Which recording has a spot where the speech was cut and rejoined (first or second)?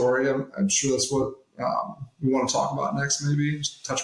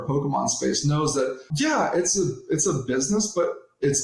second